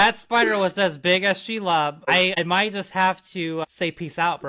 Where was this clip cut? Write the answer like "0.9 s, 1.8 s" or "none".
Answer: 2.4 s, 3.6 s